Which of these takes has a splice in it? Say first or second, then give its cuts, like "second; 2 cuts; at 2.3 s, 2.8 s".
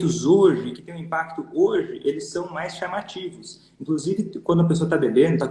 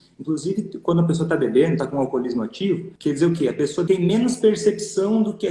second; 2 cuts; at 2.9 s, 3.8 s